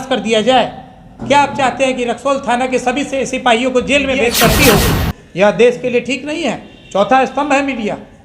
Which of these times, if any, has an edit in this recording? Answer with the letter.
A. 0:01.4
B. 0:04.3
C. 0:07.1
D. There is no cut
B